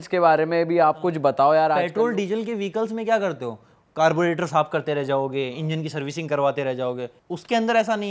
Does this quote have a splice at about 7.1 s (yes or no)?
yes